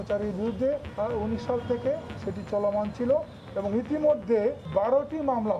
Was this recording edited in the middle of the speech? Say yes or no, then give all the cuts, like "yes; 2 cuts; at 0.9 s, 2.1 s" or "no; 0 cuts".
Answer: yes; 3 cuts; at 0.9 s, 2.2 s, 4.6 s